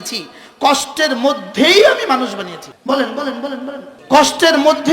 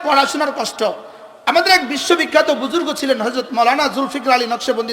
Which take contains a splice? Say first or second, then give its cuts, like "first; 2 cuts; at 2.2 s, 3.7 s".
first; 2 cuts; at 2.6 s, 3.9 s